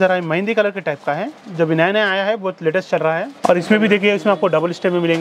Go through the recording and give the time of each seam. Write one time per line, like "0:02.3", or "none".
0:03.4